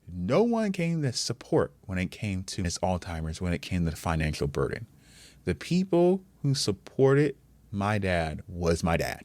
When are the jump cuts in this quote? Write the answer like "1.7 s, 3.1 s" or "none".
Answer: 2.6 s, 8.4 s